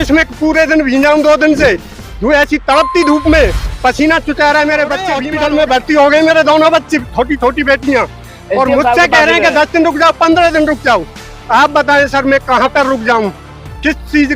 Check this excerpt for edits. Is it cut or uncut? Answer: cut